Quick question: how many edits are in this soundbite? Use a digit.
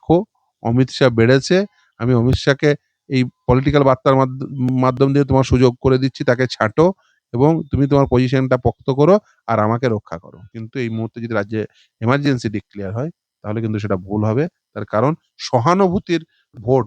1